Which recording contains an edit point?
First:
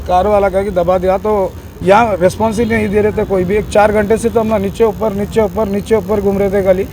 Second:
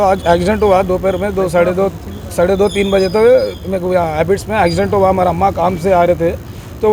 first; 1 cut; at 1.7 s

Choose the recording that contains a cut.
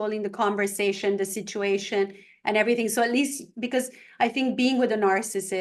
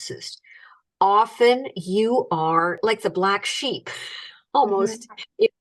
second; 1 cut; at 2.8 s

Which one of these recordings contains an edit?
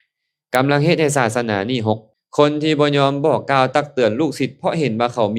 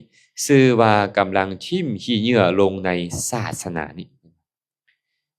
first; 1 cut; at 2.1 s

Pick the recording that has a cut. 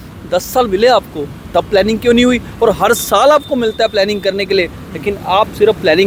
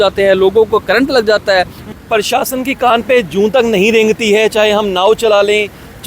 second; 1 cut; at 1.9 s

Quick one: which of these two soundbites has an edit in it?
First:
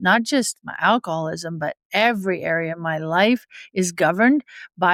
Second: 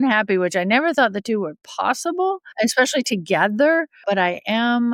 second; 2 cuts; at 2.5 s, 4.0 s

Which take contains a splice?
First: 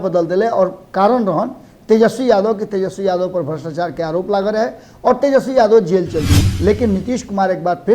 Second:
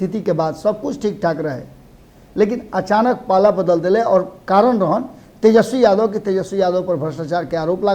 first; 1 cut; at 6.4 s

